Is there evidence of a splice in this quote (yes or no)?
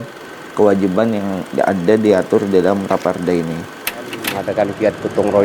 yes